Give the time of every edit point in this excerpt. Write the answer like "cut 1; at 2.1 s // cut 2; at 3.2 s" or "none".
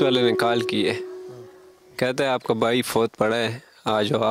none